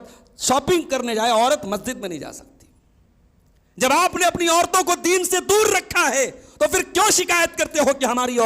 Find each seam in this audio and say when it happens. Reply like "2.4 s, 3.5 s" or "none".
none